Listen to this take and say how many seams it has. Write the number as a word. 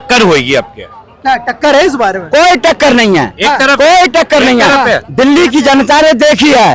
zero